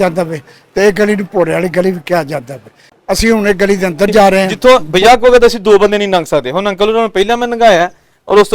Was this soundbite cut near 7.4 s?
no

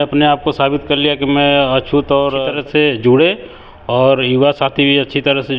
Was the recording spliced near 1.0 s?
no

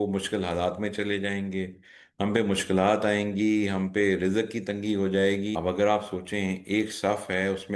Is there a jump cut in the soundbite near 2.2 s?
no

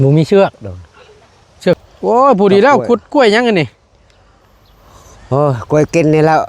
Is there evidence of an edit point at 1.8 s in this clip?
yes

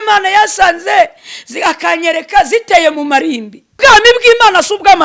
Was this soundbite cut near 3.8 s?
yes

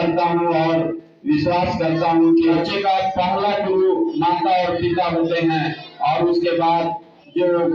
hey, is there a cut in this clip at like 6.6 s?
no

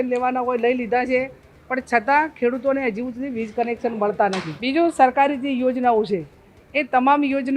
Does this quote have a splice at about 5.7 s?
no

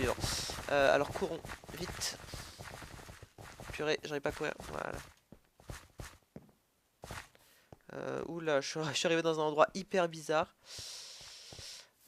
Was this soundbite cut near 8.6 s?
no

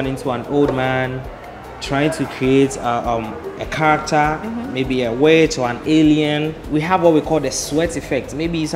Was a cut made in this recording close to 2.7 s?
no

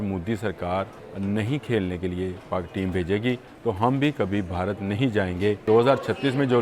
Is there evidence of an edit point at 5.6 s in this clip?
yes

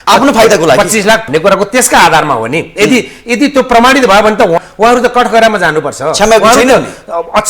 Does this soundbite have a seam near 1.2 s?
yes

